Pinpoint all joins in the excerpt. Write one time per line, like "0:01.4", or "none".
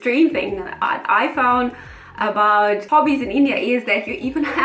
none